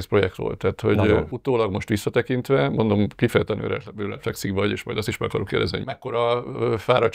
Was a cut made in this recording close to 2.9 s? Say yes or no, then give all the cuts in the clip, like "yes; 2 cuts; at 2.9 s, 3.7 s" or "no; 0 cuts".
no; 2 cuts; at 1.3 s, 5.8 s